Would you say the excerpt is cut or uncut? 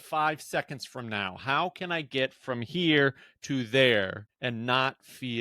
cut